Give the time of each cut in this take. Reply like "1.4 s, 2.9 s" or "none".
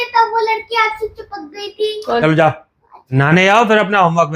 2.2 s, 3.1 s